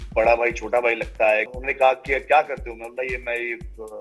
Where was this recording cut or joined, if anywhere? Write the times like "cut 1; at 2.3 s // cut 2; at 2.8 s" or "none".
cut 1; at 1.6 s

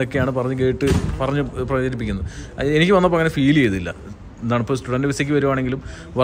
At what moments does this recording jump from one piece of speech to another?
cut 1; at 4.0 s

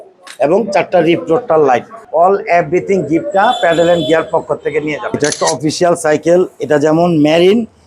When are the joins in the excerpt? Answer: cut 1; at 2.0 s // cut 2; at 5.1 s

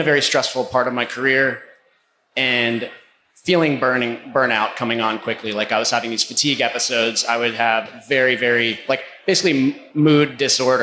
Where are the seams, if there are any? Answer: cut 1; at 9.8 s

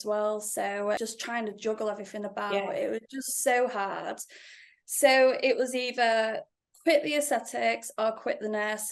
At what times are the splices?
cut 1; at 1.0 s

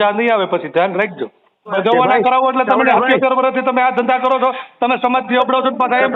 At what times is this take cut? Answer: cut 1; at 1.8 s

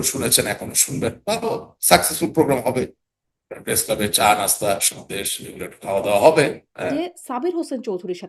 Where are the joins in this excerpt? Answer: cut 1; at 6.9 s

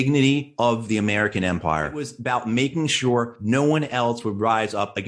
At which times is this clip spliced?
cut 1; at 2.0 s

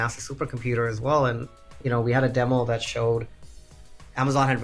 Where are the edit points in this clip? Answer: none

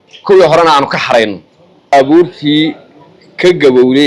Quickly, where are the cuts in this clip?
cut 1; at 1.9 s

